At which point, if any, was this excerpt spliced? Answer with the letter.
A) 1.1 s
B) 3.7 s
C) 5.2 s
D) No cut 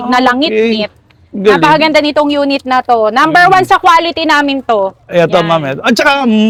D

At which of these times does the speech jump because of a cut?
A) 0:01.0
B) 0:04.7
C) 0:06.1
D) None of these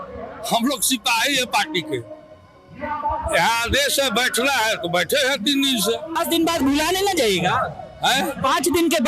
C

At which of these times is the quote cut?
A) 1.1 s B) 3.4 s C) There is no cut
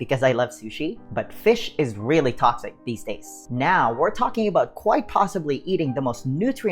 B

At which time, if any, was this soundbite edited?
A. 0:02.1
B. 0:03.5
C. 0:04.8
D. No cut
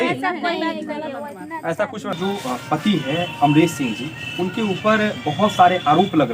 A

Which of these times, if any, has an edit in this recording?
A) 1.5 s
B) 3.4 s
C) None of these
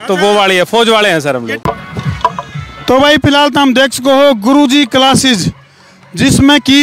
A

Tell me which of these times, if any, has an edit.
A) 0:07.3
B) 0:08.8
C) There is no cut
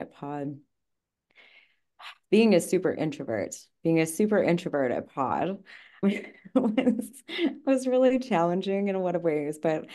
C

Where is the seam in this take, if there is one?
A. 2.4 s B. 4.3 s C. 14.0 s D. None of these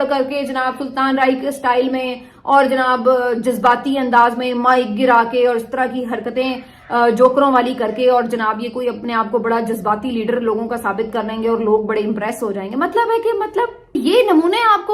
C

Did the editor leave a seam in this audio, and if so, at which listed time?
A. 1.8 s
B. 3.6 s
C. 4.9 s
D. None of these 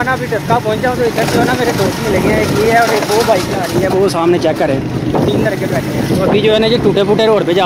D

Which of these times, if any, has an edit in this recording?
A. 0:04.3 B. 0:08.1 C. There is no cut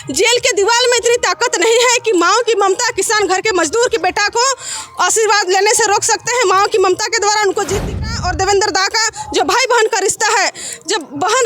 B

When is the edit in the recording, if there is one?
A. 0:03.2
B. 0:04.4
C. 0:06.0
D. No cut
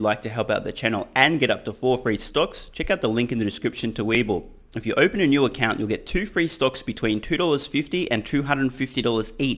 D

